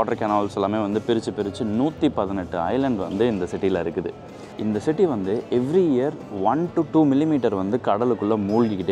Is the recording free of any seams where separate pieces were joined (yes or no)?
no